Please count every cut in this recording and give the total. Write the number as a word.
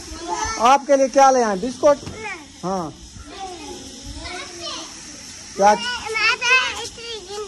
zero